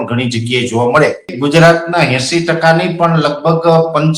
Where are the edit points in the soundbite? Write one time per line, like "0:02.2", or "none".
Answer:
0:01.3

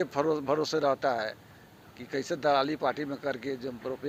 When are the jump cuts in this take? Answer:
none

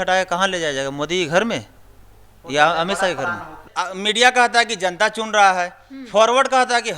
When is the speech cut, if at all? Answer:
0:03.6

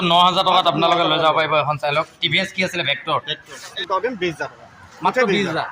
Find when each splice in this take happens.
0:03.8

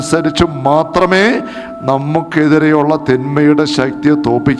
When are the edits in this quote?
none

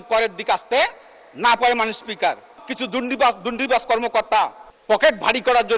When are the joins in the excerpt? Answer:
0:02.6
0:04.7

